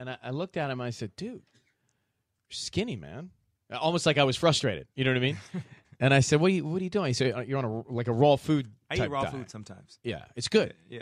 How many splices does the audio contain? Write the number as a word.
one